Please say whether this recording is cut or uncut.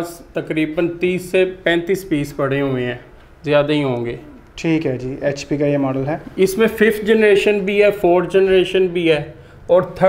uncut